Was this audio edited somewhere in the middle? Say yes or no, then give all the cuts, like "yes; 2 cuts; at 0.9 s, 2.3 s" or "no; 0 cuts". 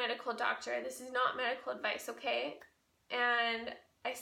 no; 0 cuts